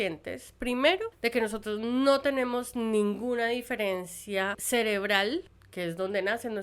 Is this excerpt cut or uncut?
cut